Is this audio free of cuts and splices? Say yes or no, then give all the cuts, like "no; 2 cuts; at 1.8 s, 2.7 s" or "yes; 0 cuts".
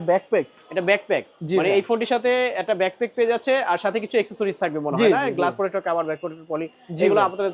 yes; 0 cuts